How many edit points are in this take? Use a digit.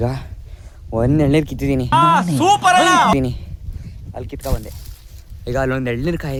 0